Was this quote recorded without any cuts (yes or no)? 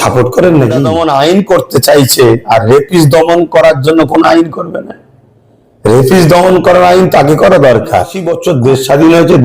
no